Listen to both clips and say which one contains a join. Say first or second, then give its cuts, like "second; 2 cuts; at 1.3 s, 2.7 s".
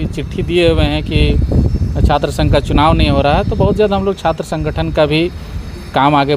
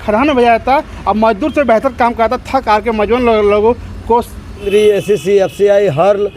second; 1 cut; at 4.7 s